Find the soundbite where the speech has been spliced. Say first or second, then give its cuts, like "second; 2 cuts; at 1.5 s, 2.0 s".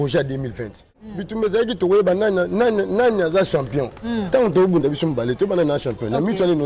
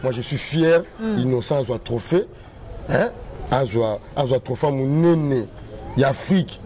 first; 1 cut; at 1.0 s